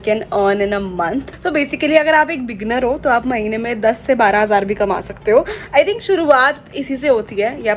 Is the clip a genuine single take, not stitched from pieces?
yes; 0 cuts

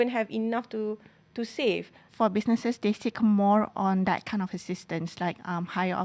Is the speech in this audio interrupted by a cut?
yes; 1 cut; at 2.0 s

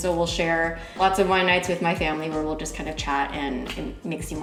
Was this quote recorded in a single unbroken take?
yes; 0 cuts

